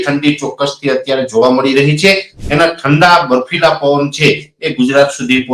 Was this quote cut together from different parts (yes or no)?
yes